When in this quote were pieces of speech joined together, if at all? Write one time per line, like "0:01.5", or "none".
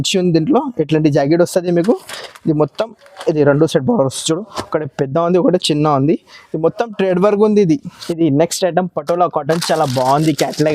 0:08.0